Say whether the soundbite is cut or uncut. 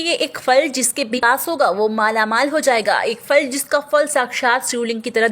cut